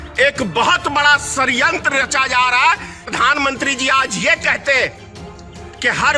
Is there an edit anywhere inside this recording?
yes; 1 cut; at 3.0 s

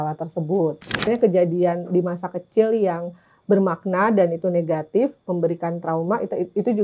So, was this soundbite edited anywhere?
yes; 1 cut; at 1.1 s

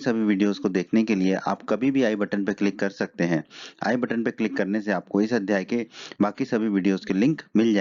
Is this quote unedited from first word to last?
no; 1 cut; at 5.7 s

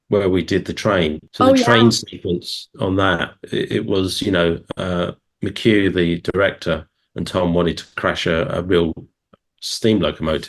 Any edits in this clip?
yes; 1 cut; at 1.2 s

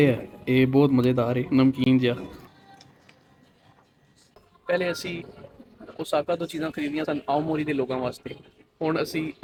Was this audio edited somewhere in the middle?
no; 0 cuts

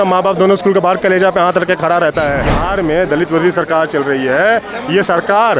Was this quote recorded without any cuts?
no; 1 cut; at 2.6 s

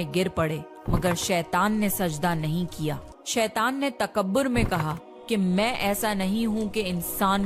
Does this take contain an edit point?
yes; 1 cut; at 3.1 s

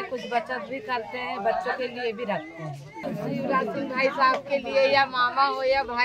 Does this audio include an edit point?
yes; 1 cut; at 3.1 s

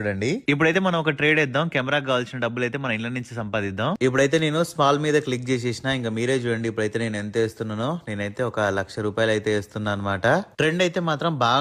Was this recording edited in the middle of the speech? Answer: no; 0 cuts

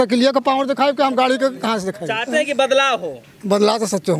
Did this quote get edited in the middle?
yes; 1 cut; at 2.1 s

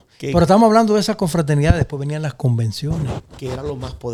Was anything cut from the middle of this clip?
no; 0 cuts

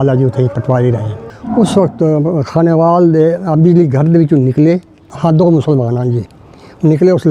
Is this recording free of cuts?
no; 1 cut; at 1.2 s

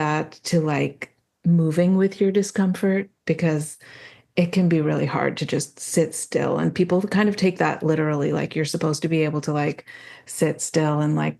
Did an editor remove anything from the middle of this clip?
no; 0 cuts

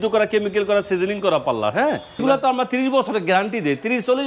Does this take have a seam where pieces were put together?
yes; 1 cut; at 2.2 s

